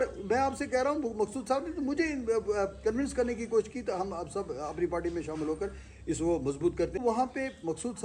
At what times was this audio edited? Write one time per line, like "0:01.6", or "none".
0:07.0